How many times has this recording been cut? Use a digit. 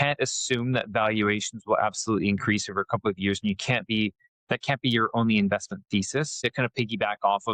1